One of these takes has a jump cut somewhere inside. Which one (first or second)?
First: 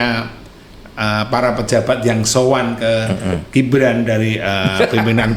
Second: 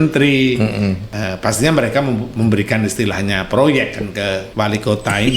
second